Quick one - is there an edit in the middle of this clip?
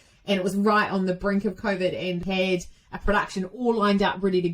yes; 1 cut; at 2.2 s

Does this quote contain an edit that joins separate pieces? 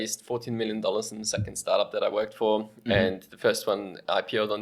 no; 0 cuts

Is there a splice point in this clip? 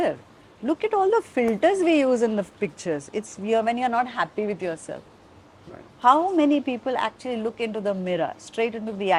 no; 0 cuts

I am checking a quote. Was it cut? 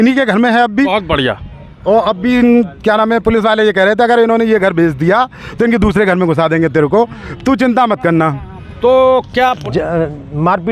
yes; 1 cut; at 9.6 s

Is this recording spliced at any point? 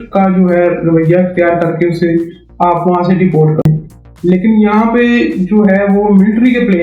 yes; 1 cut; at 3.6 s

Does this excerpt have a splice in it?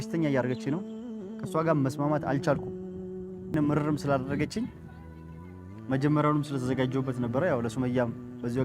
yes; 1 cut; at 3.5 s

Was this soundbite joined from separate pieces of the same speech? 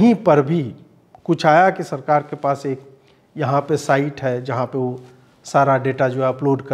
no; 0 cuts

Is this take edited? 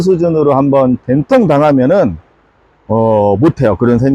no; 0 cuts

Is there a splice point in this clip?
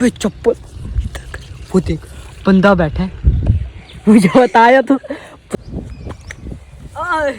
yes; 1 cut; at 5.6 s

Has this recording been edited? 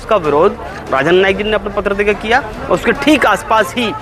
no; 0 cuts

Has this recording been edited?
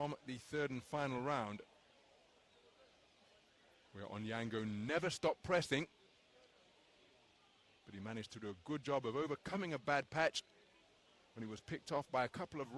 no; 0 cuts

